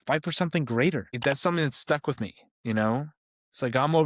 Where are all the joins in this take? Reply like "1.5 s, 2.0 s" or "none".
1.1 s